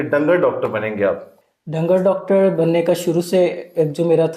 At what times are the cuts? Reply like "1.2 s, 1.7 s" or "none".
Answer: none